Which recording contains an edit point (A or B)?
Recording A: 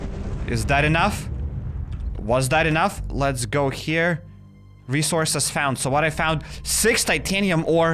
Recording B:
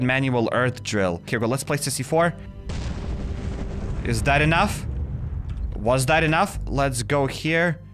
B